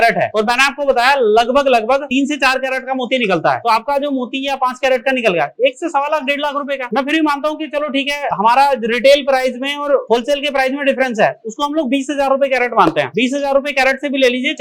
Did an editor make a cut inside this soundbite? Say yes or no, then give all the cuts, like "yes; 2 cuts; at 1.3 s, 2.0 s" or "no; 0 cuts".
no; 0 cuts